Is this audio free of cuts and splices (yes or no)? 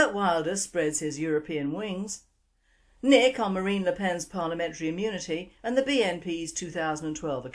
no